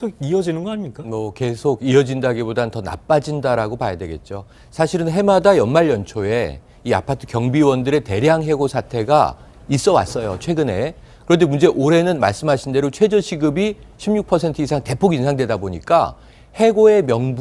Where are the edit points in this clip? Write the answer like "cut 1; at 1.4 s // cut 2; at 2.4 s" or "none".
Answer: cut 1; at 8.8 s